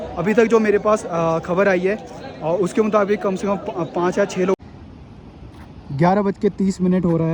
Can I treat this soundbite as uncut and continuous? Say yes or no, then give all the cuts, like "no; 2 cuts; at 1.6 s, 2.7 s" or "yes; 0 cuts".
no; 1 cut; at 4.5 s